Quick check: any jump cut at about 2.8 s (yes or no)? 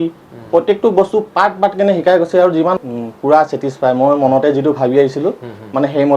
yes